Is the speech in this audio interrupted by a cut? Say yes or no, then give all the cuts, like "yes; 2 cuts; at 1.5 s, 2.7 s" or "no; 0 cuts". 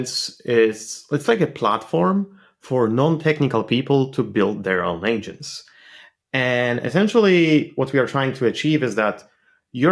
no; 0 cuts